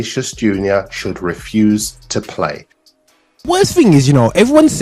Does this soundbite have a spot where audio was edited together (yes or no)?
yes